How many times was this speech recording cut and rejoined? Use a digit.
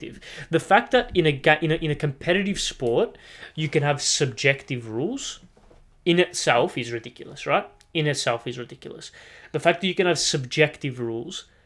0